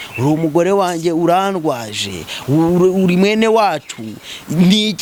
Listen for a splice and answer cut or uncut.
uncut